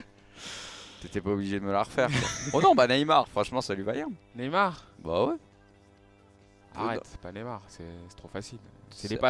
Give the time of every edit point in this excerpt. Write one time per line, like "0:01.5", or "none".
0:07.9